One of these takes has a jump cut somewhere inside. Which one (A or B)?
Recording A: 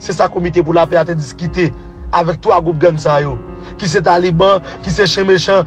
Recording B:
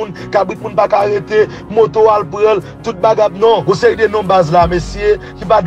B